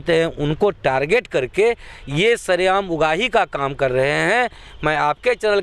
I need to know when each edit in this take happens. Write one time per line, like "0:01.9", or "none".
none